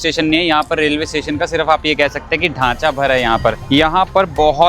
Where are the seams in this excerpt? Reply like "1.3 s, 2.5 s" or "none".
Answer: 3.6 s